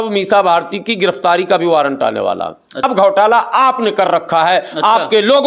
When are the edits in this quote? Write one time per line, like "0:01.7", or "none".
0:02.8